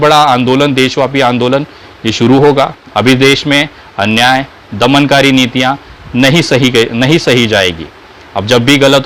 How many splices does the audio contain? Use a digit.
1